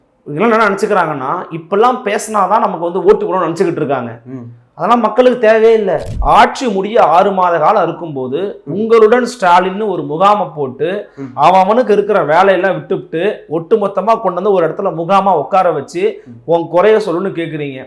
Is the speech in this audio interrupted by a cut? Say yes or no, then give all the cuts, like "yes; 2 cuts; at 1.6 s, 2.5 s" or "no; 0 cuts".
yes; 1 cut; at 6.1 s